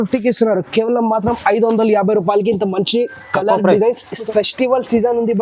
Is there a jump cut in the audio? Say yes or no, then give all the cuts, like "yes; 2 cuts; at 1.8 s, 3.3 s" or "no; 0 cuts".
yes; 1 cut; at 4.3 s